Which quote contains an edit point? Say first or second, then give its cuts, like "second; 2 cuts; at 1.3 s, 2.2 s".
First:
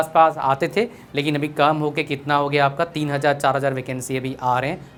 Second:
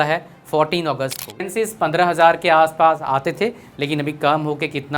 second; 1 cut; at 1.4 s